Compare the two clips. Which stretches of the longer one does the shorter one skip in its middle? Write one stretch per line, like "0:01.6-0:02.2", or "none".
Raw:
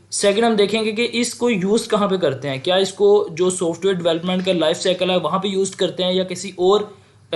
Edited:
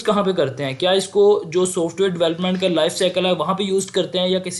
none